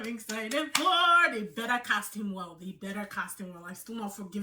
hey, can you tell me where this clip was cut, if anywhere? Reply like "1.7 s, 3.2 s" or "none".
none

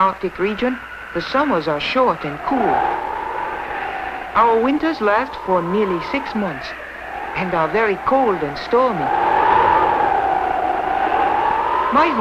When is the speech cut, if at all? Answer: none

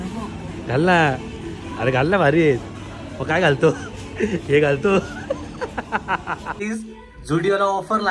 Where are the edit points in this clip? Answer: 6.6 s

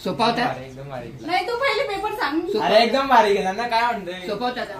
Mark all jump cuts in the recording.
none

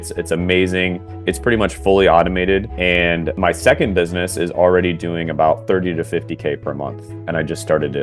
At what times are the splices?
3.0 s, 7.1 s

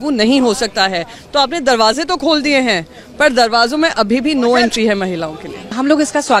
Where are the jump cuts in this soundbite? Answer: none

